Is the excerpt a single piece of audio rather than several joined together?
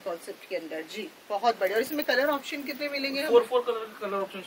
yes; 0 cuts

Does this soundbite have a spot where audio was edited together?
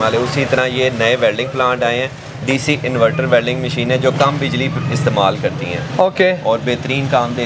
no; 0 cuts

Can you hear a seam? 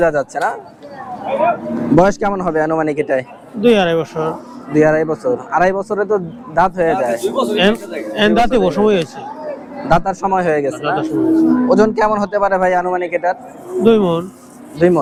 no; 0 cuts

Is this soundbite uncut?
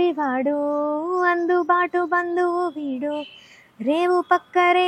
yes; 0 cuts

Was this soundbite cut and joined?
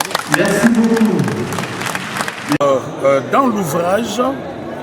yes; 1 cut; at 2.6 s

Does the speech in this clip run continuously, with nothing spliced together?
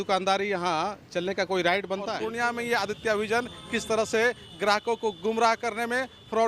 no; 1 cut; at 2.2 s

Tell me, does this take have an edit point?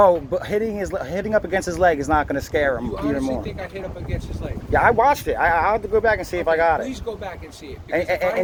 no; 0 cuts

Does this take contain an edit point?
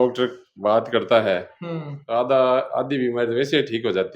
no; 0 cuts

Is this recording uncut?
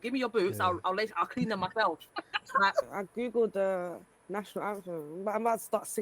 no; 1 cut; at 2.9 s

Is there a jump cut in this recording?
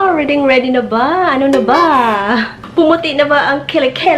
yes; 1 cut; at 2.6 s

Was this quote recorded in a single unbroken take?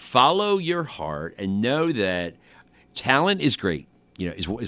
no; 1 cut; at 2.6 s

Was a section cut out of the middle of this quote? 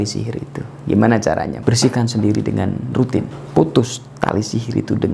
yes; 2 cuts; at 1.6 s, 3.4 s

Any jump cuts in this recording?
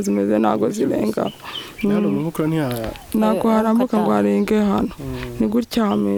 no; 0 cuts

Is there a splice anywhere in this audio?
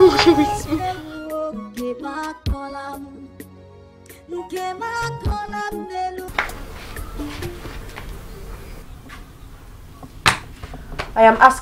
yes; 1 cut; at 6.3 s

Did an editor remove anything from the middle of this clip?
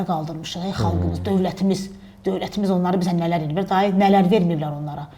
no; 0 cuts

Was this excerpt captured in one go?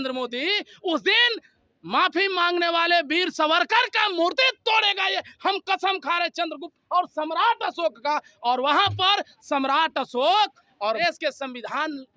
no; 1 cut; at 11.0 s

